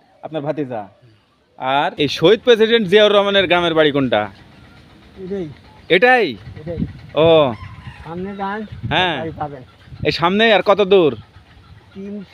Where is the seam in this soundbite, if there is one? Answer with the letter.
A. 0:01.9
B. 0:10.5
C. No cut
A